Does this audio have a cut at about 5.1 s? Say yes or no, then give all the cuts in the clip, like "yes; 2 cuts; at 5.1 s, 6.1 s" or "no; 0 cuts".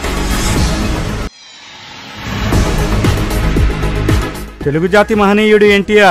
no; 2 cuts; at 1.5 s, 3.7 s